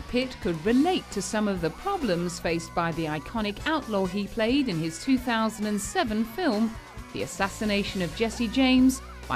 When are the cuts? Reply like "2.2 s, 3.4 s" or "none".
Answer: 4.7 s